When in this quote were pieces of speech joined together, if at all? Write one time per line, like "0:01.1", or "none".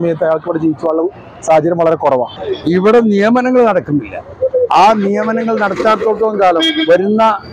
0:02.4